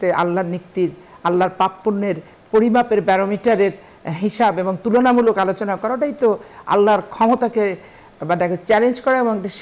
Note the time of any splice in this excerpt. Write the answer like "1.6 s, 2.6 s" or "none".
none